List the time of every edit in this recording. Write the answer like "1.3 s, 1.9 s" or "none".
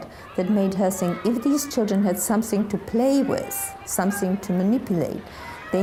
none